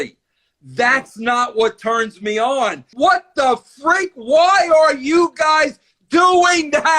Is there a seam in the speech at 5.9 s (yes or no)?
no